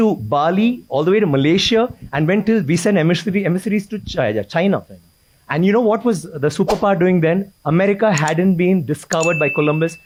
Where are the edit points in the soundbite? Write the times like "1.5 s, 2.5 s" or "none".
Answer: none